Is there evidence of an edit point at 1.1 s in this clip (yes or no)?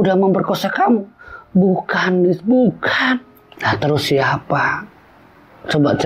no